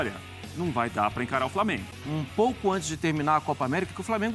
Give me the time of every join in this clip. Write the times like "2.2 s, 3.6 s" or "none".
1.9 s